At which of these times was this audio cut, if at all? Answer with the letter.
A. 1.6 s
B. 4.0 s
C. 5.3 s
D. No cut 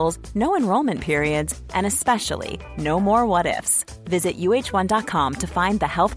D